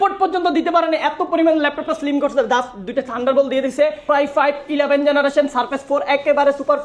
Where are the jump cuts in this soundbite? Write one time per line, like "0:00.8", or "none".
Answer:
0:04.0